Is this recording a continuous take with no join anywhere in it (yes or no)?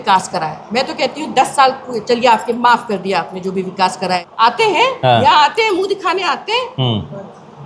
no